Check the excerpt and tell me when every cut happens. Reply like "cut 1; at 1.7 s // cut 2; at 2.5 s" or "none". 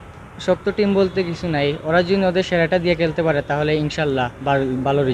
none